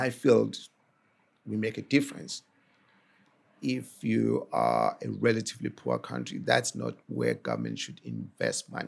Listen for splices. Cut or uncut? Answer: uncut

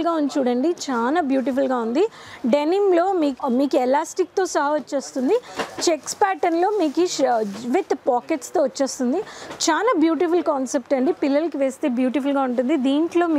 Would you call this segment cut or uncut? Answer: uncut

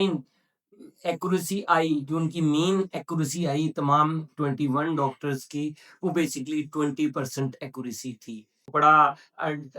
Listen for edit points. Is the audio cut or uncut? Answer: cut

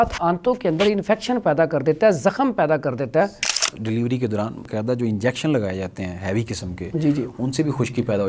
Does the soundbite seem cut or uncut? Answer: cut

